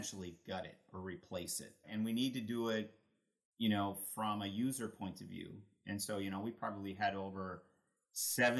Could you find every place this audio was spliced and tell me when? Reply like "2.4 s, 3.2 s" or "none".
1.9 s